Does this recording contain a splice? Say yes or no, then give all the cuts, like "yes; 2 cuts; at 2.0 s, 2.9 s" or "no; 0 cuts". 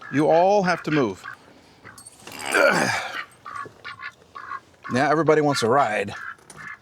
no; 0 cuts